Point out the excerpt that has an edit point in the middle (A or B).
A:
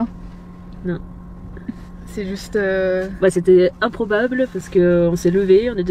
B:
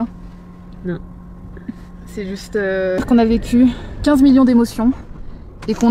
B